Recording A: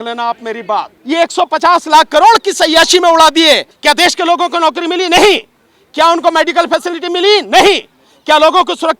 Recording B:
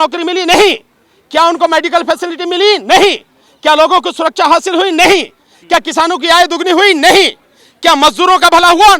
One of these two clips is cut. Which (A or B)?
A